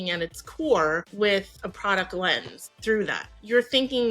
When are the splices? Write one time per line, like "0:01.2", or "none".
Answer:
0:01.1
0:03.0

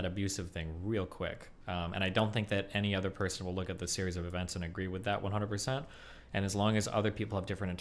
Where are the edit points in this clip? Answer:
none

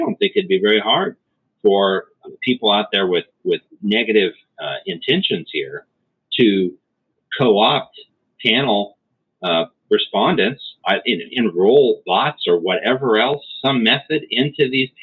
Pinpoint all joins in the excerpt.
0:02.1
0:03.7

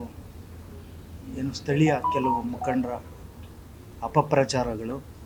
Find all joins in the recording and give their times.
none

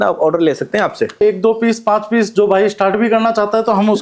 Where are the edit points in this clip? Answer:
0:01.2

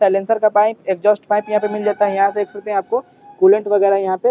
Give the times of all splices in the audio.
none

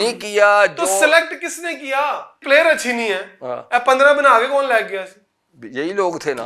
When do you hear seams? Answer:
0:02.4

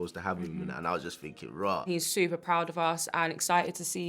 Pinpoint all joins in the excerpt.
0:01.9

